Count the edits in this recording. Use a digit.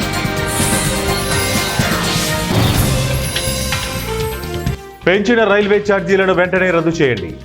1